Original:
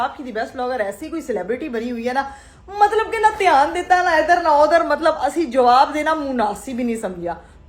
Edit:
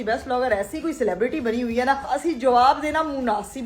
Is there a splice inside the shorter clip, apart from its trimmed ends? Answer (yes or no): yes